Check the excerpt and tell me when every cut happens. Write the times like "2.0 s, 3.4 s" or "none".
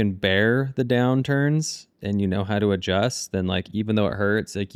none

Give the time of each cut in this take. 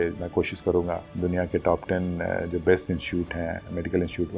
none

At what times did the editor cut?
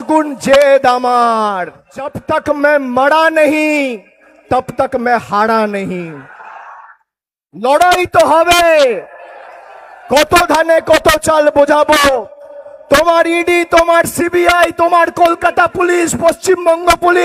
2.2 s

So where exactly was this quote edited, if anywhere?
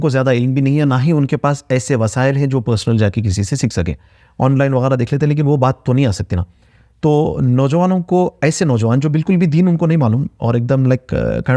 none

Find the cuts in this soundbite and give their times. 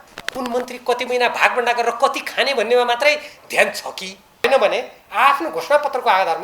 4.4 s

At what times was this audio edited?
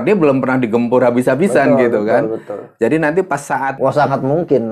3.7 s

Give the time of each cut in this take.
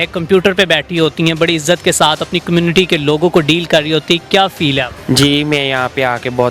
4.9 s

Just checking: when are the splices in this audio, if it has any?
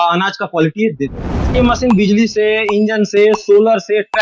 1.5 s

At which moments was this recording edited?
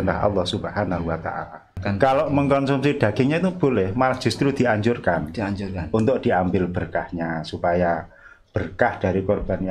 1.8 s

